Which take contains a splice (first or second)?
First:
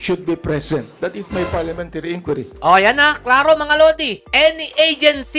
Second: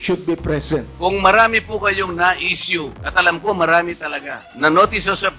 second